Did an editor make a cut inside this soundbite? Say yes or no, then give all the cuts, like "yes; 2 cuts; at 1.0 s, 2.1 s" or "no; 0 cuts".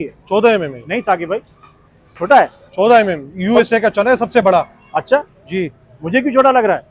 no; 0 cuts